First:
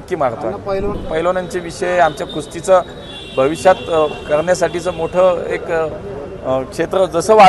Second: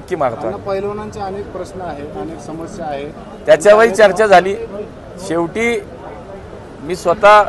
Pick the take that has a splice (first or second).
first